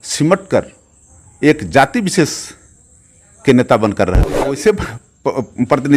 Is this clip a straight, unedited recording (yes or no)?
no